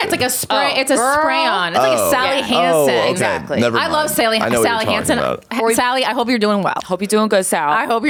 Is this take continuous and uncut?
yes; 0 cuts

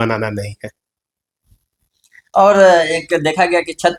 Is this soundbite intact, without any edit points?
yes; 0 cuts

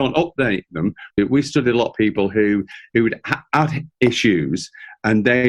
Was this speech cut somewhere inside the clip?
yes; 1 cut; at 1.2 s

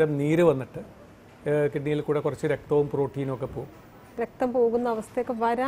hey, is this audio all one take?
no; 1 cut; at 4.2 s

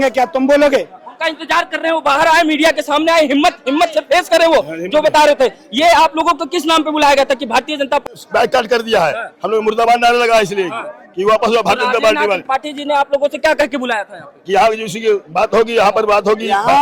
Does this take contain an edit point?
yes; 1 cut; at 8.0 s

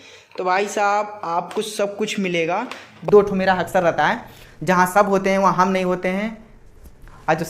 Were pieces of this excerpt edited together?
yes; 1 cut; at 2.9 s

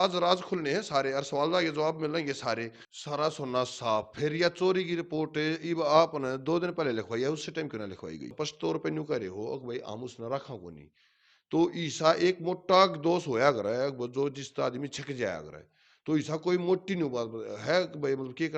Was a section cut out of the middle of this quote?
yes; 2 cuts; at 2.8 s, 8.3 s

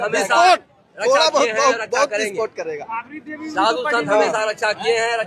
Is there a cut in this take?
no; 0 cuts

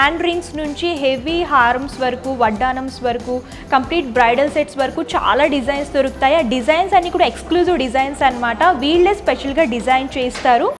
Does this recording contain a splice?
no; 0 cuts

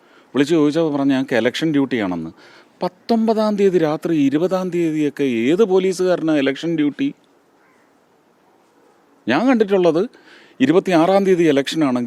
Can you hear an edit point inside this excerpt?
no; 0 cuts

